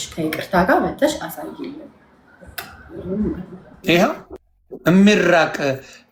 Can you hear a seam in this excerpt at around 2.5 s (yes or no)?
no